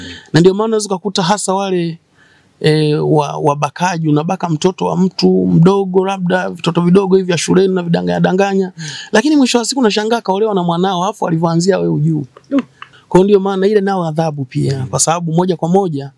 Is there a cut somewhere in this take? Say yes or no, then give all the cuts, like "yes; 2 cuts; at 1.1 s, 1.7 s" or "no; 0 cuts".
no; 0 cuts